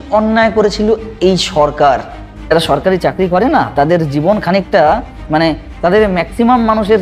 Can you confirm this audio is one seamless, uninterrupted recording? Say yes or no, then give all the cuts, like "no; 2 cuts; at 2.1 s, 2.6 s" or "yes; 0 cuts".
no; 1 cut; at 2.5 s